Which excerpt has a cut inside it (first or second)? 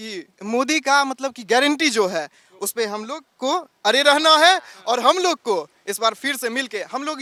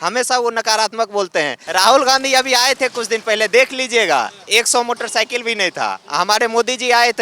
second